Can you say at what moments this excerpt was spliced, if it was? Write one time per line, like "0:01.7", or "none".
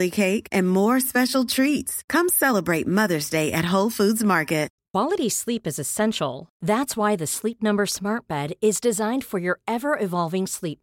0:04.8